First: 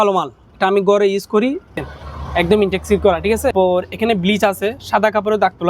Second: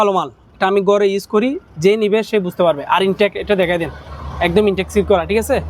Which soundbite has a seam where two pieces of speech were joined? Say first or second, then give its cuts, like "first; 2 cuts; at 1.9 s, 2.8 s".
first; 2 cuts; at 1.8 s, 3.5 s